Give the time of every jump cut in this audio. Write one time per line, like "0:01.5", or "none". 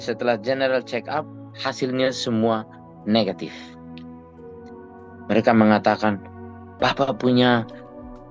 0:03.5
0:04.9